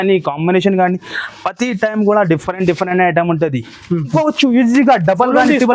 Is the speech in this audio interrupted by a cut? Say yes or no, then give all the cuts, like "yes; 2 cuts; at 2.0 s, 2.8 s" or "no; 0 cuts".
yes; 1 cut; at 4.1 s